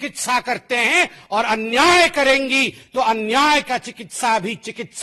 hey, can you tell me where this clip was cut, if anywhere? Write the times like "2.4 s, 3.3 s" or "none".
none

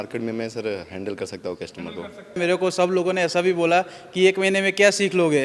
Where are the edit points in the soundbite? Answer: 2.4 s

